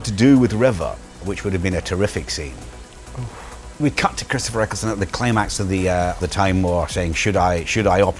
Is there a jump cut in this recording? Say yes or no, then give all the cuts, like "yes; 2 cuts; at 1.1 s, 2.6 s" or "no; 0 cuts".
yes; 3 cuts; at 1.2 s, 3.1 s, 6.2 s